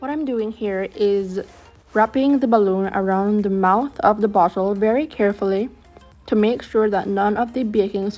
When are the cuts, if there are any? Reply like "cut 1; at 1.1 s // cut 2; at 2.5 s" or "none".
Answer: none